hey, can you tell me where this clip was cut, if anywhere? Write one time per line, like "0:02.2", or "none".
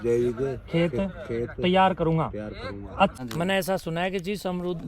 0:03.2